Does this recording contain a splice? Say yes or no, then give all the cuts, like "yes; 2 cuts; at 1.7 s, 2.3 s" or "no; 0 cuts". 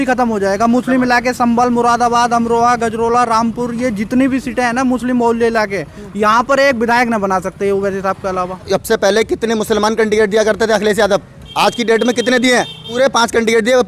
yes; 3 cuts; at 8.7 s, 11.4 s, 12.8 s